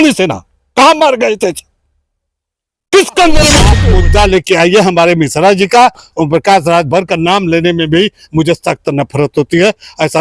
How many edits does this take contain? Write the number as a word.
one